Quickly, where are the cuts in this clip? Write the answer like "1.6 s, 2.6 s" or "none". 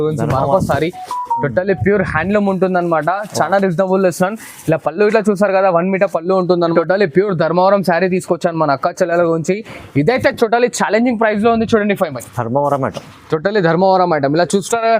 6.7 s